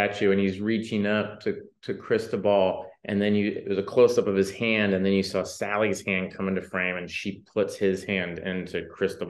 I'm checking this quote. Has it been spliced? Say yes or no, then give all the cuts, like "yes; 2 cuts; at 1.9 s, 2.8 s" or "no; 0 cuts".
no; 0 cuts